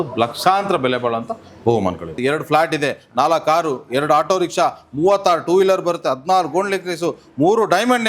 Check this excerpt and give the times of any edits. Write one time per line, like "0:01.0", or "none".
0:02.1